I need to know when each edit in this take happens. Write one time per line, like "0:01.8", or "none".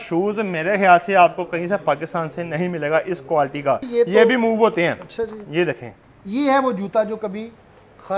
0:03.9
0:05.9